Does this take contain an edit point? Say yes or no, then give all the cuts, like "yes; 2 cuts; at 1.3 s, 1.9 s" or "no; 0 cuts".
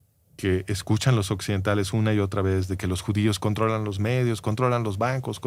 no; 0 cuts